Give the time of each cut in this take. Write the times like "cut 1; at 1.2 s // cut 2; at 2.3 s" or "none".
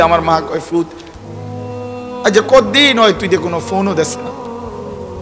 cut 1; at 4.3 s